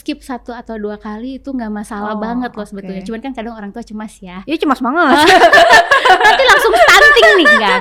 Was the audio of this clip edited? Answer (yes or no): no